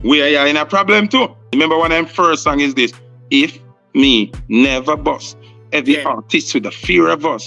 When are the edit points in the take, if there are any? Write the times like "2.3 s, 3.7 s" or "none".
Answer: 1.5 s